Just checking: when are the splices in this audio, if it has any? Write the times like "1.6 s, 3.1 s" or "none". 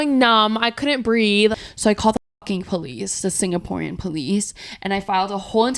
1.5 s